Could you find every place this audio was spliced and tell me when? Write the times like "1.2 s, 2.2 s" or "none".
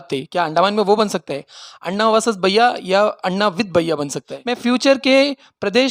4.3 s